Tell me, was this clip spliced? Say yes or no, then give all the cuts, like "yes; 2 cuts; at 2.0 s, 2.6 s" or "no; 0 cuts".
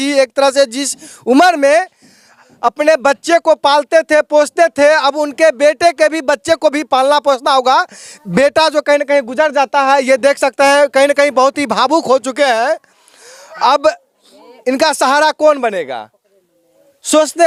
no; 0 cuts